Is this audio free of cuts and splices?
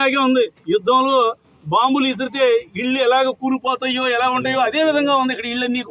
yes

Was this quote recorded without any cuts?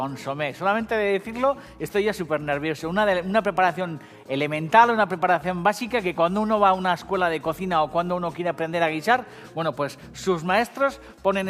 no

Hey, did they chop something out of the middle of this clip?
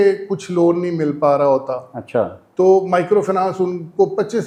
no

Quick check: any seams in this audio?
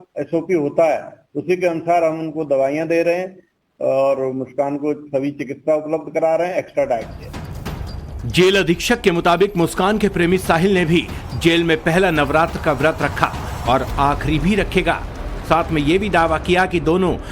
yes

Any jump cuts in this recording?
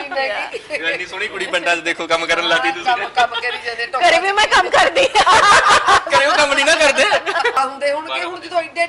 yes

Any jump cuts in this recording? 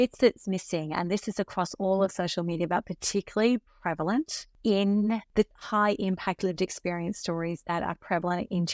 yes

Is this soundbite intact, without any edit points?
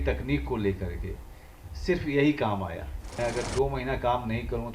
no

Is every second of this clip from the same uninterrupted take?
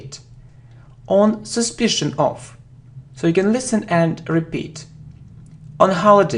no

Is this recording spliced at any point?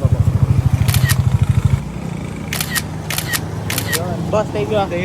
yes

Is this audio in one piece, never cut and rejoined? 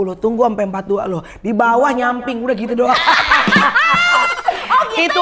yes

